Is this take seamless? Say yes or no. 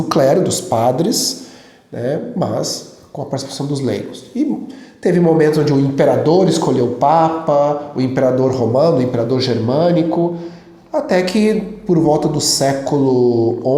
yes